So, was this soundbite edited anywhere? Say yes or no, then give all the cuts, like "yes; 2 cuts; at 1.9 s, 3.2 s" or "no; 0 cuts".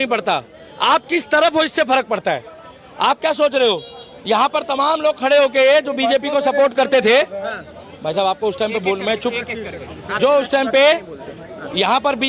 no; 0 cuts